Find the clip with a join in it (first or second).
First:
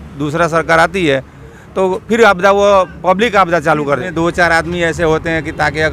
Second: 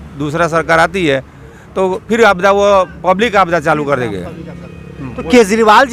first